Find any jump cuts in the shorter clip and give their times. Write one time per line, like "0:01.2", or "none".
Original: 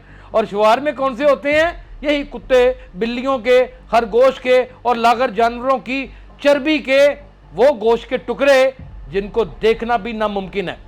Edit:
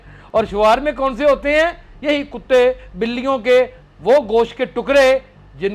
0:03.8